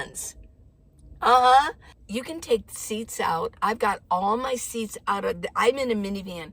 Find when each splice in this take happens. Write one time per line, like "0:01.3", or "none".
none